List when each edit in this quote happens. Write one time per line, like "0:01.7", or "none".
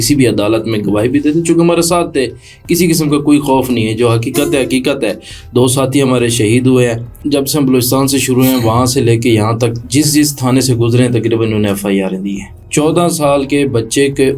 0:07.2
0:12.5